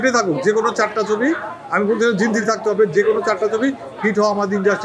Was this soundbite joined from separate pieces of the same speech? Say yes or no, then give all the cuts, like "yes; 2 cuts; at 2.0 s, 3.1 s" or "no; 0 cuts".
no; 0 cuts